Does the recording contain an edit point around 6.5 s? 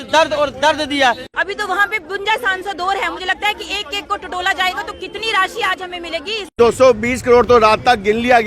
yes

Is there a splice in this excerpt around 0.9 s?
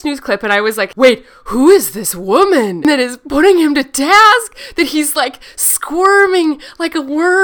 yes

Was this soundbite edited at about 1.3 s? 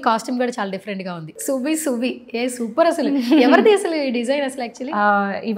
yes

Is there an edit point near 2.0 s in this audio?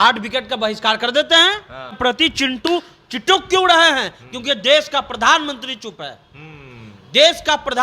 yes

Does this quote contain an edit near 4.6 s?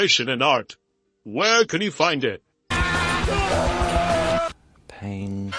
no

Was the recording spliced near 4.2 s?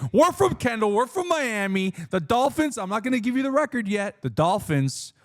yes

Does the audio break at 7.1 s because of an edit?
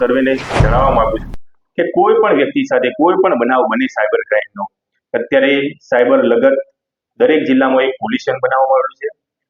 no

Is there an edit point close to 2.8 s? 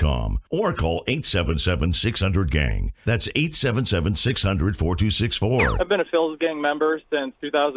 no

